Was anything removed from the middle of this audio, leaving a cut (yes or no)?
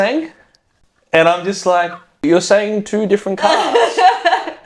yes